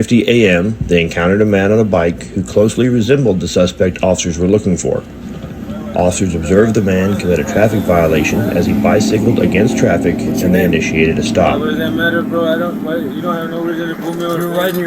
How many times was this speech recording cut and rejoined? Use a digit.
1